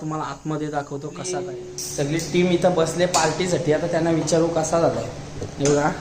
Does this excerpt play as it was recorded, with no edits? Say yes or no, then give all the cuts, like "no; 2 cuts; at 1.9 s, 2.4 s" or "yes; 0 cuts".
no; 1 cut; at 1.4 s